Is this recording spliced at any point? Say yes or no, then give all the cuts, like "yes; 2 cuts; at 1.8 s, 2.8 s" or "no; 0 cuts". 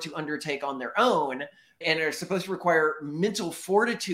yes; 1 cut; at 1.8 s